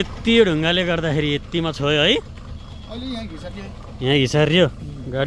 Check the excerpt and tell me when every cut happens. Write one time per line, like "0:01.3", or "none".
none